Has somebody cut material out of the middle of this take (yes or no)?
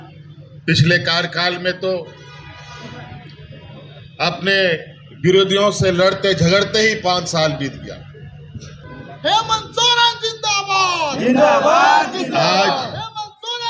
yes